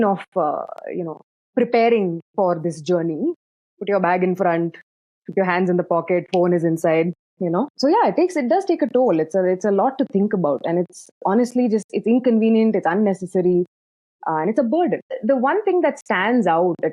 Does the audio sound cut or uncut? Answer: cut